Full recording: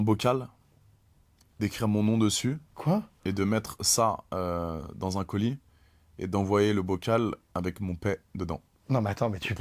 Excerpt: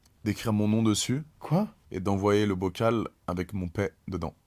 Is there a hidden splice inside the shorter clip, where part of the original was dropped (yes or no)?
yes